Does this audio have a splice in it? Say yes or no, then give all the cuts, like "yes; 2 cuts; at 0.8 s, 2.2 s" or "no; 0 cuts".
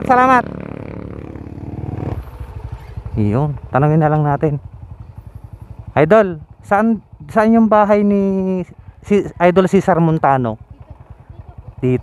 yes; 1 cut; at 2.1 s